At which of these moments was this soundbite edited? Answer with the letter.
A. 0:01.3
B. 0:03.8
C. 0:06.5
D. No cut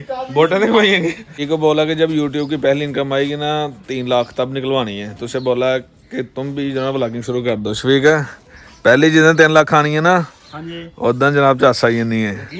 A